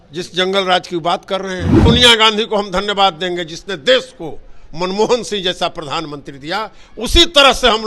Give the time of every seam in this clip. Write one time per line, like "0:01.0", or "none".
0:01.8

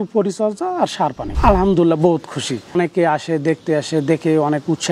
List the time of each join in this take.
0:01.3
0:02.7

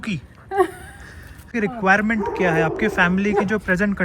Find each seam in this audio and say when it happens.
0:01.5

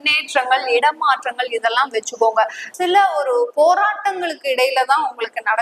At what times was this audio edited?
0:02.6

